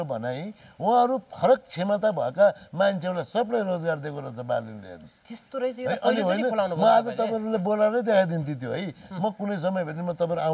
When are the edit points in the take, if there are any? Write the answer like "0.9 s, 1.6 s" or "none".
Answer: none

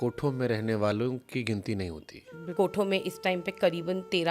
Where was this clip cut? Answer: 2.5 s

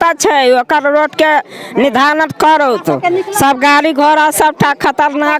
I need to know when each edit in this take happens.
none

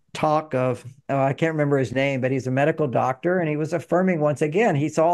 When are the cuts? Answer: 0.9 s

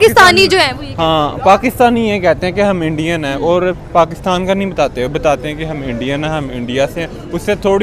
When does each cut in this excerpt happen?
none

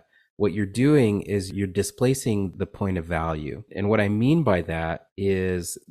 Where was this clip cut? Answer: 1.5 s, 2.5 s, 3.7 s

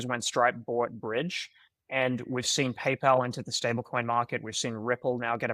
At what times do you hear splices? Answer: none

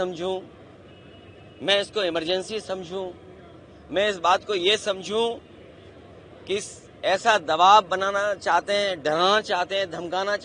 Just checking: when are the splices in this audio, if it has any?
none

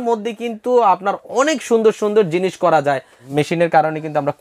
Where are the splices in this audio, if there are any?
3.1 s

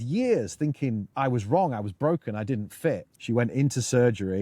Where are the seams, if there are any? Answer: 1.1 s, 3.1 s

